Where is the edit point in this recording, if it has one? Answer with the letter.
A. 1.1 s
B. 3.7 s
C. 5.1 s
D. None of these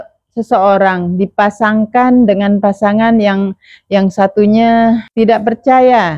C